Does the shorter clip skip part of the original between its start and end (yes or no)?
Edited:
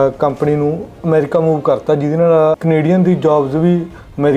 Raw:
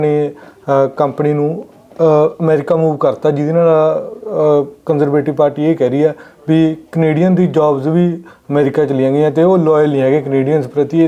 yes